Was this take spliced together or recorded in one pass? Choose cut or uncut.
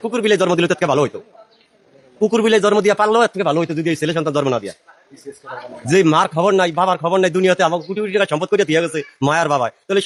uncut